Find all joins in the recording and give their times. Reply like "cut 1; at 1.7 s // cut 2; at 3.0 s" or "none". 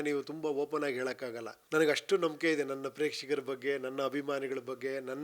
cut 1; at 1.5 s

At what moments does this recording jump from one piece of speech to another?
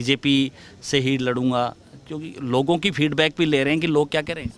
none

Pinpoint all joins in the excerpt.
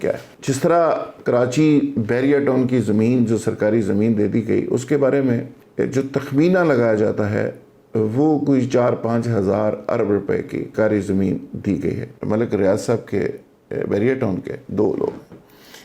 cut 1; at 5.6 s // cut 2; at 10.7 s // cut 3; at 12.1 s

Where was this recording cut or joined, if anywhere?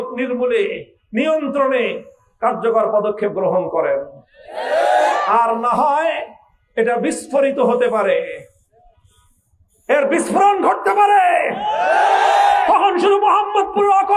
none

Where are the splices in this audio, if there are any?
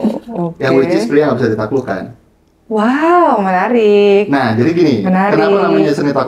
none

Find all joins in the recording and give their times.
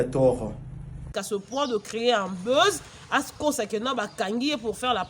cut 1; at 1.1 s // cut 2; at 3.7 s

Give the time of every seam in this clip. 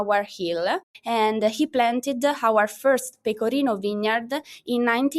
cut 1; at 0.9 s

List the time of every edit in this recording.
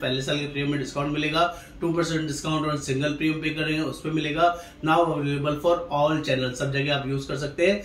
none

